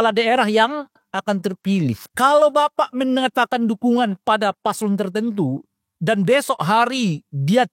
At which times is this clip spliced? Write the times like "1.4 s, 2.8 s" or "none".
2.1 s